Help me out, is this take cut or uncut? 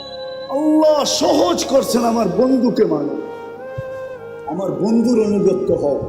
cut